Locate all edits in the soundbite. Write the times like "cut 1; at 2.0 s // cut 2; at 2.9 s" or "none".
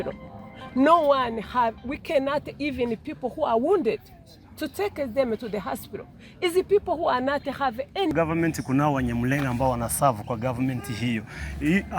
cut 1; at 8.1 s